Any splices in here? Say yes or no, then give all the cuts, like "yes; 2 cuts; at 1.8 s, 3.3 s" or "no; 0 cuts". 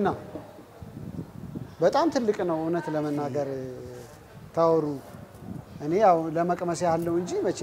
no; 0 cuts